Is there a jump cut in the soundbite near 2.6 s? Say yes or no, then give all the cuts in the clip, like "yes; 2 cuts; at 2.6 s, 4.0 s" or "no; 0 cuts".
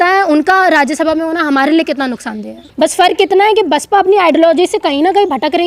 yes; 1 cut; at 2.6 s